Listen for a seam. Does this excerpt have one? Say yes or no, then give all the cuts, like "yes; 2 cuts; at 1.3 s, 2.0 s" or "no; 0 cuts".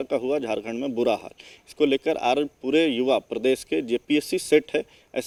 no; 0 cuts